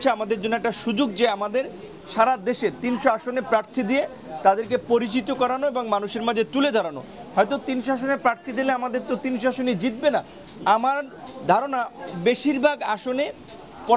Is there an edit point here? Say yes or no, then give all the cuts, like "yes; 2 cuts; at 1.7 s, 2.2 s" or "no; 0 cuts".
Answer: no; 0 cuts